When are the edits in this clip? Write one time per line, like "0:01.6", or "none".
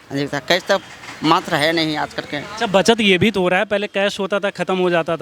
none